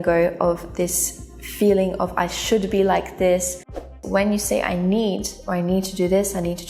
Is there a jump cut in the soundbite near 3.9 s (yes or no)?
yes